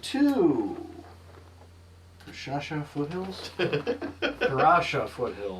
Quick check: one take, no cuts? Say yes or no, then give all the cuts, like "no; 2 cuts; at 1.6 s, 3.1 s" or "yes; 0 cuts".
yes; 0 cuts